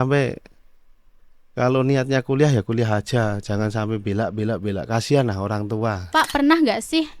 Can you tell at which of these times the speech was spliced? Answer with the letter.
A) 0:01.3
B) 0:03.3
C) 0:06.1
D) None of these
C